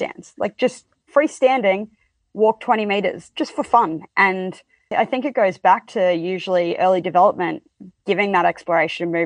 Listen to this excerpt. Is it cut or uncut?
cut